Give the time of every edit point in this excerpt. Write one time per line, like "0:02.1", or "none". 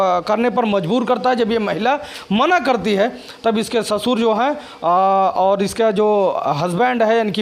none